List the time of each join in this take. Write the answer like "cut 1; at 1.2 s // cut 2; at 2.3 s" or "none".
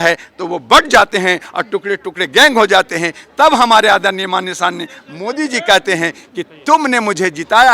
none